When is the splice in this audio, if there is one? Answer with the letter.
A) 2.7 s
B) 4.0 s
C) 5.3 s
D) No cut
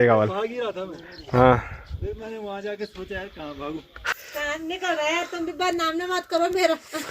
B